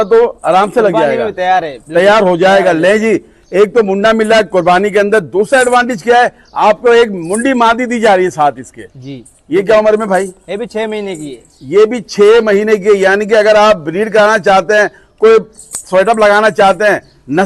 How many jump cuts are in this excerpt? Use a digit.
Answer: 0